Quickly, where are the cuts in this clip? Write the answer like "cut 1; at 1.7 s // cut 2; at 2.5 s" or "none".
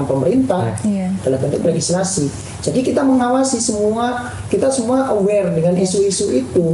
none